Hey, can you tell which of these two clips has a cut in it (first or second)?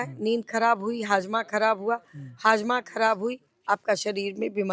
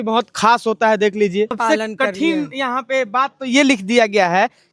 second